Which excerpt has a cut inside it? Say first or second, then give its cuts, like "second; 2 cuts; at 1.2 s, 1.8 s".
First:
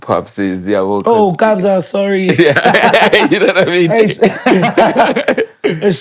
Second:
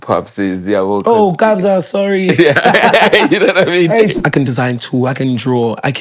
second; 1 cut; at 4.2 s